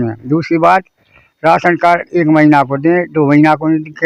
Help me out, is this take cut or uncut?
uncut